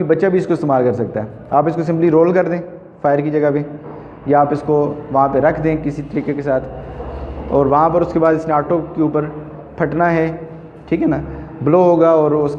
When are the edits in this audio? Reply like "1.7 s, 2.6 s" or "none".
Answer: none